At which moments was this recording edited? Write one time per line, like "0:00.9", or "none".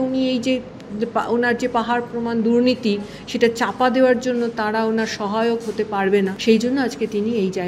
0:06.4